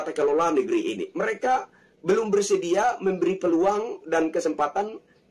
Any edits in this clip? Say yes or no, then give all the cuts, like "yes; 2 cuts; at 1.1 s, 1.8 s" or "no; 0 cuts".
no; 0 cuts